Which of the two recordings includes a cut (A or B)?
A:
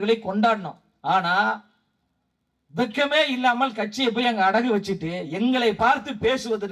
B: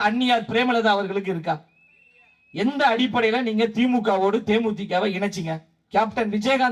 B